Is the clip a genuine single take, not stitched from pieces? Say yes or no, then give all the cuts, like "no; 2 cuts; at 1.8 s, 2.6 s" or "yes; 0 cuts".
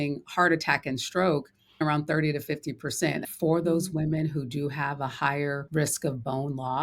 no; 3 cuts; at 1.8 s, 3.3 s, 5.6 s